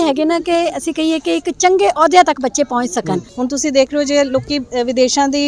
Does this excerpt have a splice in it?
yes; 1 cut; at 3.3 s

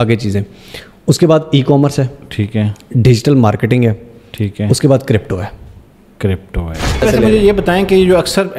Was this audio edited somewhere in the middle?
yes; 1 cut; at 7.0 s

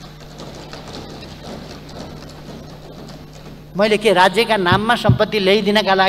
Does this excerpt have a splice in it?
no; 0 cuts

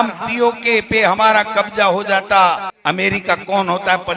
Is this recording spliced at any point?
yes; 1 cut; at 2.7 s

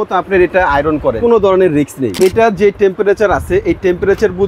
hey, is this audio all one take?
no; 2 cuts; at 1.2 s, 2.2 s

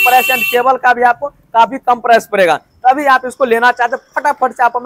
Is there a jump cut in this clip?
no; 0 cuts

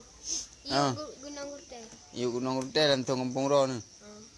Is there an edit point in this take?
no; 0 cuts

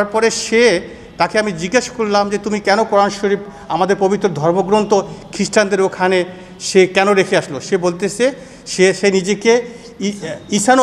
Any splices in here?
no; 0 cuts

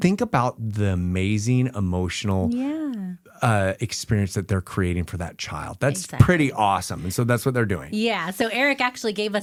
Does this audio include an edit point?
no; 0 cuts

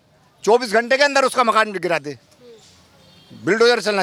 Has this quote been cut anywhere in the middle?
no; 0 cuts

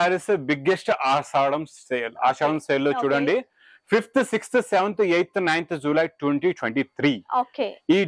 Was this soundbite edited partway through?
no; 0 cuts

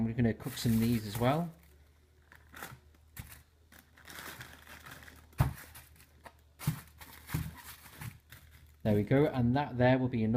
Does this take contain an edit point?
no; 0 cuts

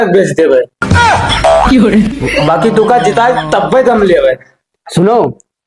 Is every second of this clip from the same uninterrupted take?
yes; 0 cuts

